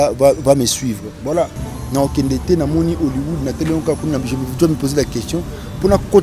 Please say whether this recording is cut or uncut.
cut